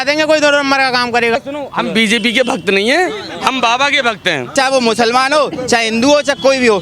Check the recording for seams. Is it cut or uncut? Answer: cut